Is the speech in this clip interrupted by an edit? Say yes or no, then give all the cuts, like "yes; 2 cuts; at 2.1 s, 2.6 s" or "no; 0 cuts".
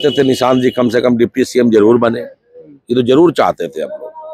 no; 0 cuts